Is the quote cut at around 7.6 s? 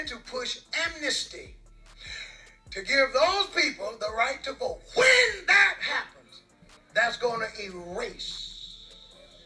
no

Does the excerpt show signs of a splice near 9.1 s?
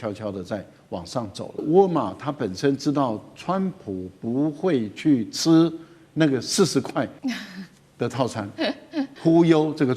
yes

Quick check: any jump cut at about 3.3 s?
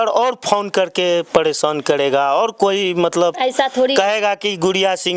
no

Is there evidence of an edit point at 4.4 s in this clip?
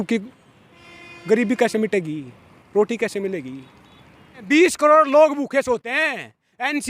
yes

